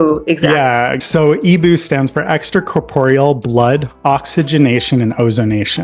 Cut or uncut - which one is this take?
cut